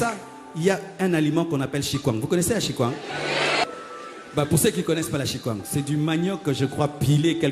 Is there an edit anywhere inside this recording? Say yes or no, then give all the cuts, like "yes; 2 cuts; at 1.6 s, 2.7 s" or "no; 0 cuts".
yes; 1 cut; at 3.6 s